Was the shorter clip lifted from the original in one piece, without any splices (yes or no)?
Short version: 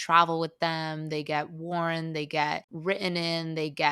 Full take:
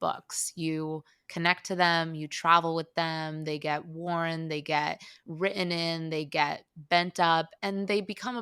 no